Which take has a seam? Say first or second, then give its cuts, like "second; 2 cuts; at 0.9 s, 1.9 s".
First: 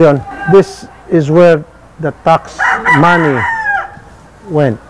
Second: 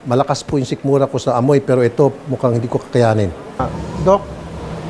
second; 1 cut; at 3.8 s